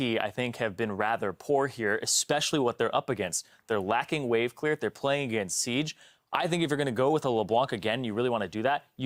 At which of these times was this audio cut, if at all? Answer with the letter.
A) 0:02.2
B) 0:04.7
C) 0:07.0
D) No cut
D